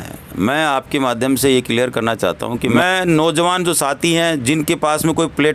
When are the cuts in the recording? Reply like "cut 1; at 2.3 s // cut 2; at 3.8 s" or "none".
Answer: cut 1; at 2.8 s